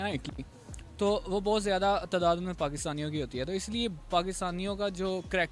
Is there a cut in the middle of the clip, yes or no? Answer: no